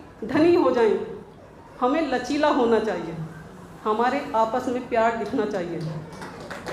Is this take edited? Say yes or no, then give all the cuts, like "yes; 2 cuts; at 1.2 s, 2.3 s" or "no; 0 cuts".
no; 0 cuts